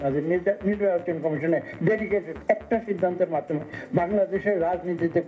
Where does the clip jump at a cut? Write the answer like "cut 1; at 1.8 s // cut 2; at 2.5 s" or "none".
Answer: cut 1; at 2.3 s